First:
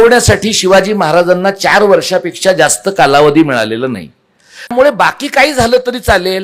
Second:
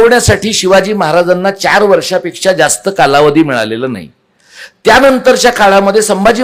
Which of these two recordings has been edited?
first; 1 cut; at 4.7 s

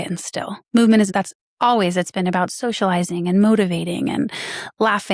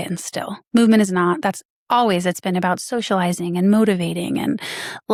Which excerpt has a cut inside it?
first; 1 cut; at 1.1 s

